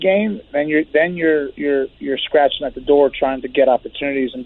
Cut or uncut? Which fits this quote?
uncut